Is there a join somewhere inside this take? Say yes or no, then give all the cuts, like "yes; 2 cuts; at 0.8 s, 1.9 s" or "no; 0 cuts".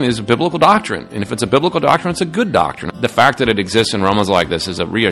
yes; 1 cut; at 2.8 s